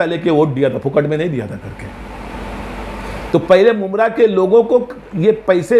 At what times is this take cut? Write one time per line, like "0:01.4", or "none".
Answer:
none